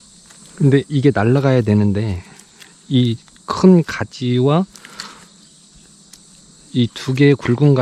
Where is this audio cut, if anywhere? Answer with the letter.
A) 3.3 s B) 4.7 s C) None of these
C